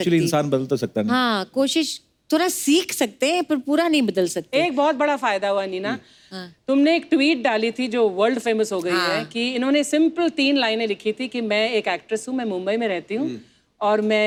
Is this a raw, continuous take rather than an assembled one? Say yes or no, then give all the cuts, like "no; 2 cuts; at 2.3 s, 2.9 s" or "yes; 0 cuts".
yes; 0 cuts